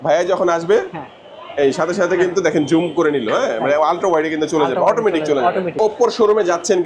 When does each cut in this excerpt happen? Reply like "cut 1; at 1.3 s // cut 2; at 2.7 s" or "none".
cut 1; at 5.8 s